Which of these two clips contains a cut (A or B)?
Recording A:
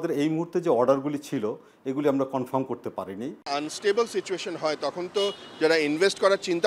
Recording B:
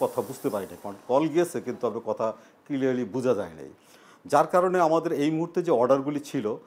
A